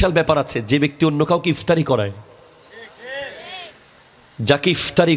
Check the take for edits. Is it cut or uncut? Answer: uncut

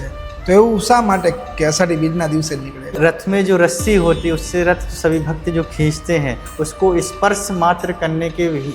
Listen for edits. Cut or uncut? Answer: cut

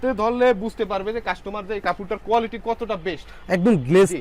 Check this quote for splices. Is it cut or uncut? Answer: uncut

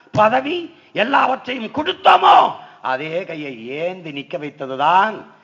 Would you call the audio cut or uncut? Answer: uncut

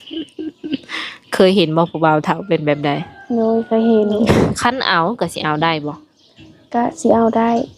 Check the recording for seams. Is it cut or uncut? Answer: cut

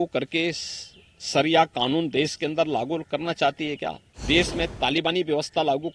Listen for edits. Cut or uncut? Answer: cut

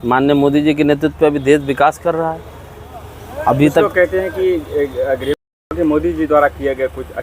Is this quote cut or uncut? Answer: cut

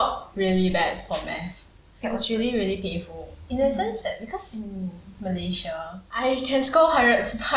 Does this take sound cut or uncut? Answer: cut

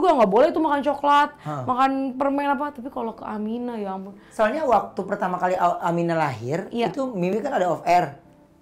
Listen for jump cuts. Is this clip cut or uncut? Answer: cut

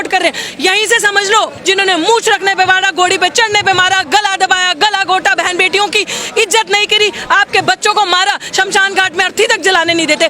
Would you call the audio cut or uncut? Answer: cut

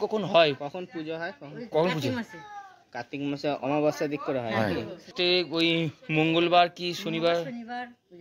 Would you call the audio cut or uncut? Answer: cut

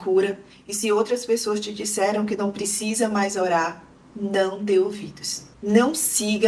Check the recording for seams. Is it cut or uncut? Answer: cut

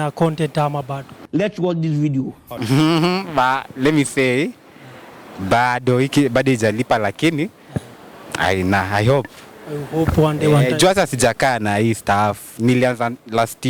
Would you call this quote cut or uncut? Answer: uncut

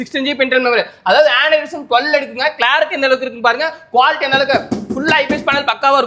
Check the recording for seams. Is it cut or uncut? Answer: uncut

